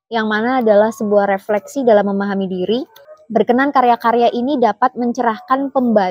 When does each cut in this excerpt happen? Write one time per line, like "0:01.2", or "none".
0:03.0